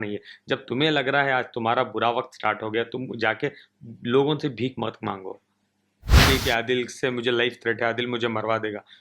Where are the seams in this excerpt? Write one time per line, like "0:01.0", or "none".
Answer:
0:06.2